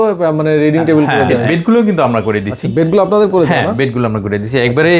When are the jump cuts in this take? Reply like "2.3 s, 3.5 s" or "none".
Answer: 1.5 s